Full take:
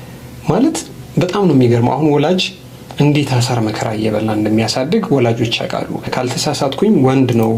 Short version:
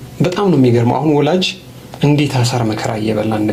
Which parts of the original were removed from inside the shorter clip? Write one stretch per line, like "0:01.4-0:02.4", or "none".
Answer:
none